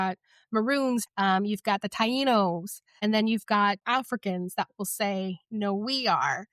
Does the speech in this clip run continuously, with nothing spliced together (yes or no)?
no